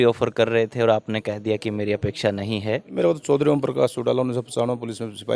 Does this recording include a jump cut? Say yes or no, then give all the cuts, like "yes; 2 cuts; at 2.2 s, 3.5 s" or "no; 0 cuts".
yes; 1 cut; at 2.9 s